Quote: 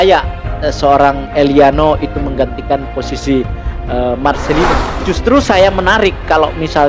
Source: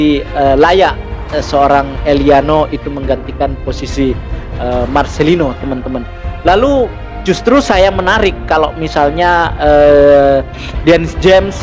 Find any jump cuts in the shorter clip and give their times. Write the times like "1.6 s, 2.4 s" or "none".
4.9 s